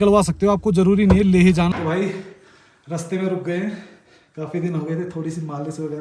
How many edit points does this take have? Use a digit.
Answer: 1